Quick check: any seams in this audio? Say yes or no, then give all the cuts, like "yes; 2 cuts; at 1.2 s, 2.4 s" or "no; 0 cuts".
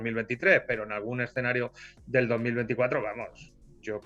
no; 0 cuts